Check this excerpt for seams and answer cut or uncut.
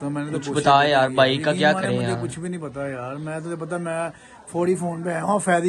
uncut